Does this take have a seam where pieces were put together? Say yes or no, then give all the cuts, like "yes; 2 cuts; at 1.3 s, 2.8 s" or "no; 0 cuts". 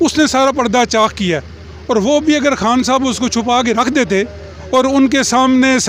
no; 0 cuts